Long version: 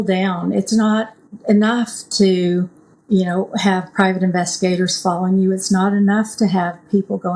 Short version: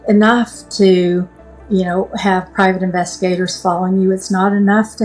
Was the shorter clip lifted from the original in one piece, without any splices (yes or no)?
yes